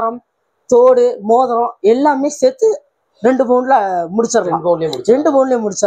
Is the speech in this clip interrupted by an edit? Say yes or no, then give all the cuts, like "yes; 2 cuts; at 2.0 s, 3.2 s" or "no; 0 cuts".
no; 0 cuts